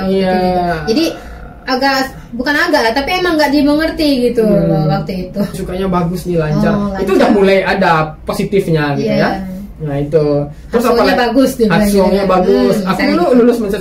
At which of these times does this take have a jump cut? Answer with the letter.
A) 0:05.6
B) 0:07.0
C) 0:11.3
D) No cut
A